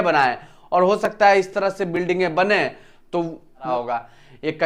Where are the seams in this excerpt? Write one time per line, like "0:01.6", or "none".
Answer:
0:03.7